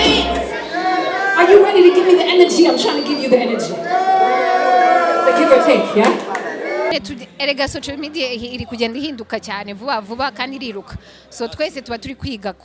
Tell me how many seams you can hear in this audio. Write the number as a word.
one